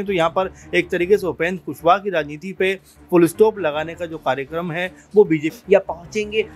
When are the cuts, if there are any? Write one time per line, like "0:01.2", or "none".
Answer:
0:05.6